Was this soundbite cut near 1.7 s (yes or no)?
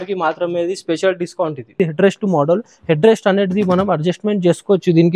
yes